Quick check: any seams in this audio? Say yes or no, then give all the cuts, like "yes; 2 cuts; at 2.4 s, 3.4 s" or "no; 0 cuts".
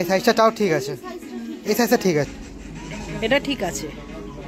yes; 1 cut; at 2.3 s